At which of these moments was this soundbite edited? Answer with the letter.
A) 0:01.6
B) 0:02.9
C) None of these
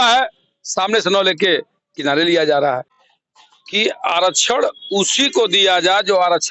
B